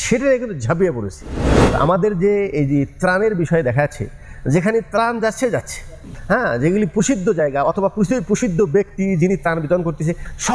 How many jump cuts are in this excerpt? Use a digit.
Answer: 2